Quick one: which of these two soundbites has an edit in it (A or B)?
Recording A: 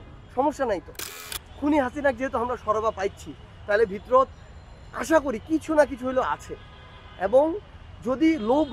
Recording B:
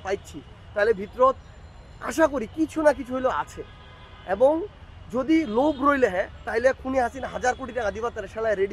A